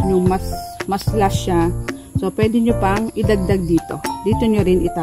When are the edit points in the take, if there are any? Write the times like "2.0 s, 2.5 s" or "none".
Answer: none